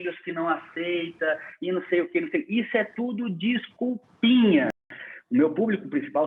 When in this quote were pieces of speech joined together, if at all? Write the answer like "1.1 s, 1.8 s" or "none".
4.9 s